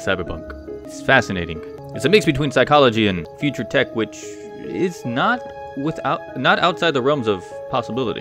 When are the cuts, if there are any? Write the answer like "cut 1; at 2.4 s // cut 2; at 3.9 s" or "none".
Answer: cut 1; at 0.9 s // cut 2; at 1.8 s // cut 3; at 3.3 s